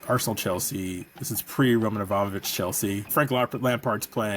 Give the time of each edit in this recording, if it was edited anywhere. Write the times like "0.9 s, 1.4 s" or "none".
3.1 s